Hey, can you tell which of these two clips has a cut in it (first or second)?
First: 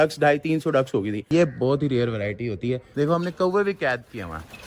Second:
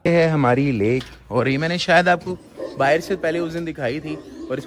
first